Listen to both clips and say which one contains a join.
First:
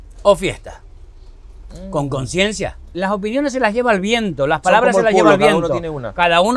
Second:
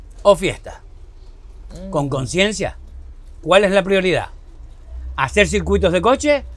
first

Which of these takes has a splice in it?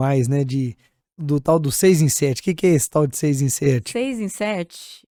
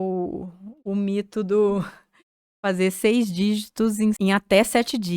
second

